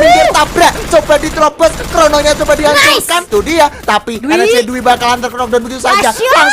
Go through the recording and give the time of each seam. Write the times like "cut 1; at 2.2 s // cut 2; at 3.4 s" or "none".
cut 1; at 3.2 s